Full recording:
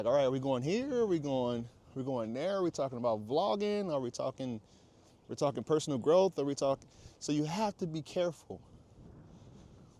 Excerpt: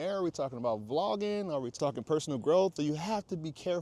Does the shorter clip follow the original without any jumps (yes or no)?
no